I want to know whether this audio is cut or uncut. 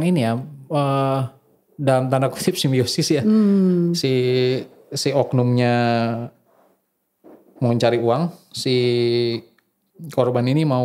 uncut